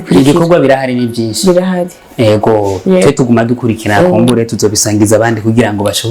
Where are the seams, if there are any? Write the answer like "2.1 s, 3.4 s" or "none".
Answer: none